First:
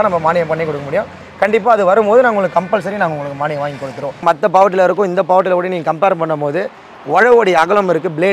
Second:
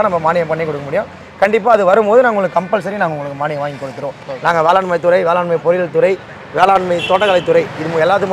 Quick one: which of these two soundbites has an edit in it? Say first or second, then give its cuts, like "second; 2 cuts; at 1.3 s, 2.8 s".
first; 1 cut; at 4.2 s